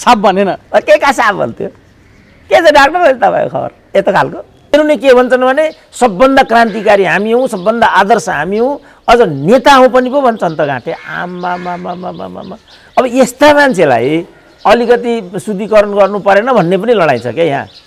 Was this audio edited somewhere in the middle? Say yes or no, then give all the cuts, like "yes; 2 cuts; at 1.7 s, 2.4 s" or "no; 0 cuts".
yes; 1 cut; at 4.7 s